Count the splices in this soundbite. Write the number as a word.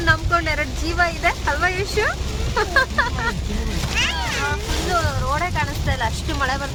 zero